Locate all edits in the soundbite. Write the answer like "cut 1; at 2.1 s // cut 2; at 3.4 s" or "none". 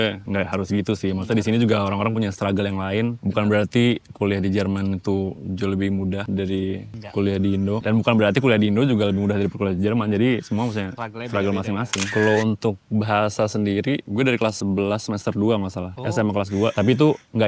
cut 1; at 12.1 s